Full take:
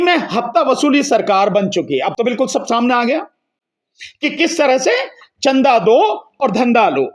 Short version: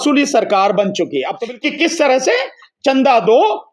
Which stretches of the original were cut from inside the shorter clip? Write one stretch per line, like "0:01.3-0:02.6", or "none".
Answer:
0:02.2-0:04.0